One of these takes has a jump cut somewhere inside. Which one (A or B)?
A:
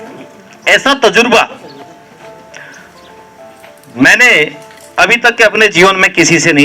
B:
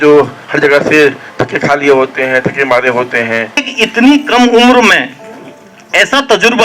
B